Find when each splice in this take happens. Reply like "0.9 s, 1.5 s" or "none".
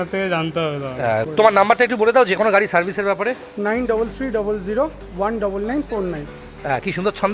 1.2 s